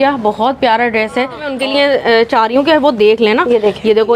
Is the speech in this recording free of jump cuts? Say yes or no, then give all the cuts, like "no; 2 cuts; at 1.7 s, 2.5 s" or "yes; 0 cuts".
no; 1 cut; at 1.4 s